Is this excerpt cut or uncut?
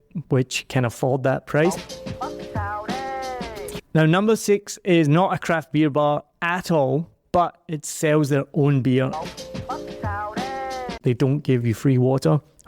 cut